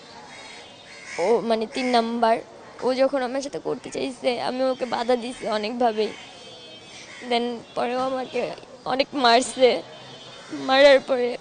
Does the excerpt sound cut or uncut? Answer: uncut